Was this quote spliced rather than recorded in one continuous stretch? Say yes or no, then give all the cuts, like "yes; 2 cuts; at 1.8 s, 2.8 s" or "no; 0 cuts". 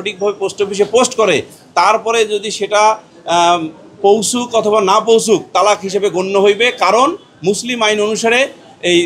no; 0 cuts